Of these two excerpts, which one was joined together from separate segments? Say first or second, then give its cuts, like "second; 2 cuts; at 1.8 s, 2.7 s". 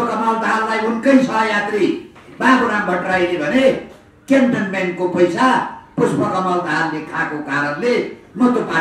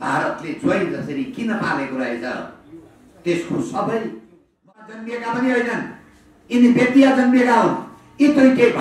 second; 1 cut; at 4.7 s